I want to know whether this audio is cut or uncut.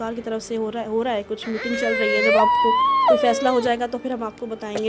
uncut